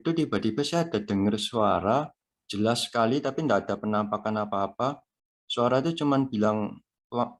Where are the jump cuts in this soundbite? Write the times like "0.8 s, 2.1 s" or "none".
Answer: none